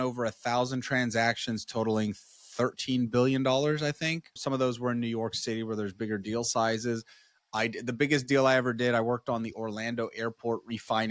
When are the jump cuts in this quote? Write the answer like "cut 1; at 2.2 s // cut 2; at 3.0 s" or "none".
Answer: cut 1; at 4.4 s